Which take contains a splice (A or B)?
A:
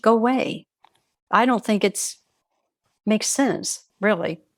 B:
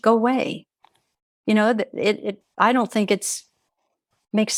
A